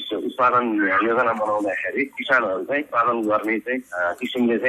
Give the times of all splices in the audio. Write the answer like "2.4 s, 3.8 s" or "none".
2.9 s